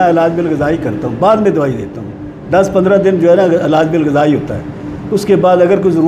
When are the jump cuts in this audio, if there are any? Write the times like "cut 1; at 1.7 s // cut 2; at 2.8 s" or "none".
none